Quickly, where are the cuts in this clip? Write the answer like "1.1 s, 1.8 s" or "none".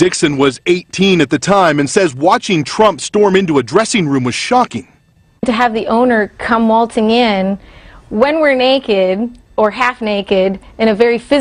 none